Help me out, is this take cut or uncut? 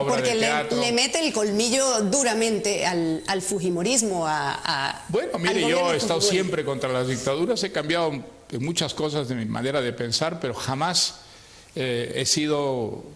cut